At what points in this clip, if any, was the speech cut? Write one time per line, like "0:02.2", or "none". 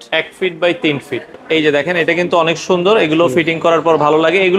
0:01.4